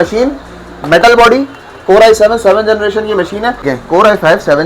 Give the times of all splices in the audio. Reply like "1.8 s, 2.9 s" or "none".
3.7 s